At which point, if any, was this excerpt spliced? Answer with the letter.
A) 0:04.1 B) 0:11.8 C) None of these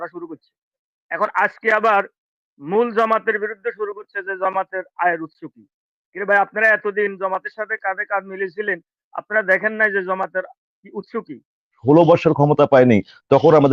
B